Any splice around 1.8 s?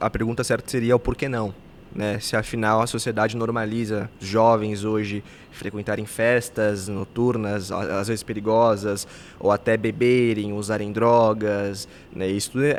no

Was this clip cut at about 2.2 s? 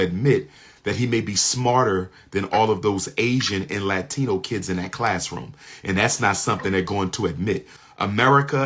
no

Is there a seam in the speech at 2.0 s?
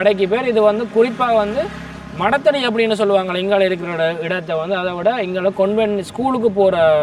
no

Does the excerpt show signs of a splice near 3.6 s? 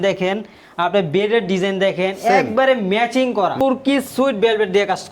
yes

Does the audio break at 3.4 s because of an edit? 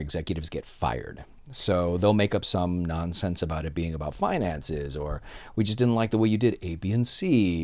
no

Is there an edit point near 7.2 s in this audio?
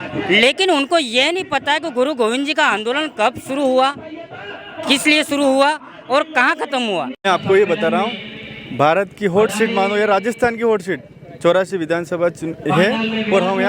yes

